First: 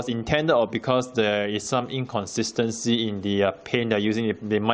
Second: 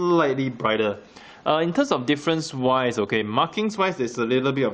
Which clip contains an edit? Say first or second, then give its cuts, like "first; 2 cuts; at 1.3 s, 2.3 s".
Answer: second; 1 cut; at 2.5 s